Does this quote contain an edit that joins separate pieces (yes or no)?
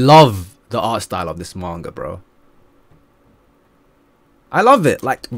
no